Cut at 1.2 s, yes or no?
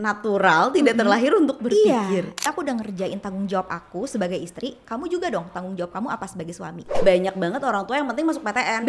no